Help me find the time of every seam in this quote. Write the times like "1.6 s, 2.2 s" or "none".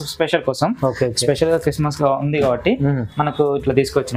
none